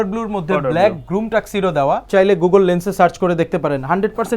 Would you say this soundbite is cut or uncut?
cut